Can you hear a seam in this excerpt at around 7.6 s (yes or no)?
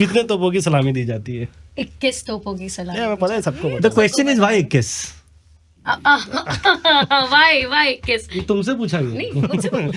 no